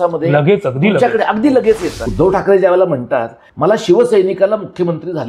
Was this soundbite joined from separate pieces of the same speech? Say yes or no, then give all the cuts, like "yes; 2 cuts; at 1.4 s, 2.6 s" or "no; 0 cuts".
yes; 2 cuts; at 2.0 s, 3.4 s